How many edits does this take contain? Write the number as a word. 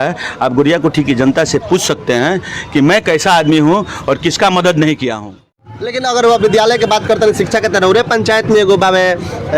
one